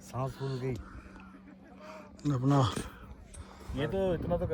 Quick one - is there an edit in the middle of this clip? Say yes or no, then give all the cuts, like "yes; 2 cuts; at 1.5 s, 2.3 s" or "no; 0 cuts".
no; 0 cuts